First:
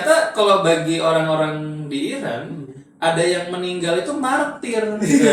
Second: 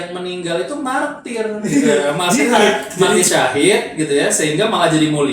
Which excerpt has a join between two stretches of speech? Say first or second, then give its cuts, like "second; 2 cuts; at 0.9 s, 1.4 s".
second; 1 cut; at 3.2 s